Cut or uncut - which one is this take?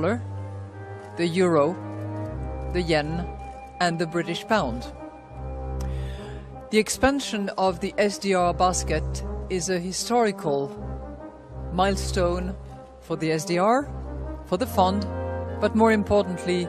uncut